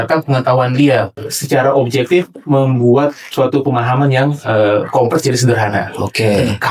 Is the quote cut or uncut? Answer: cut